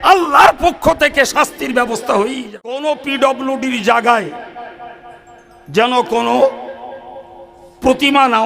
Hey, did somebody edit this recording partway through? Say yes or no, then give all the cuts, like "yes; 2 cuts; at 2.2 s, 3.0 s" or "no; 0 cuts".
yes; 1 cut; at 2.8 s